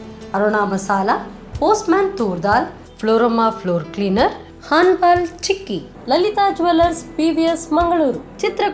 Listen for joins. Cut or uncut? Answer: uncut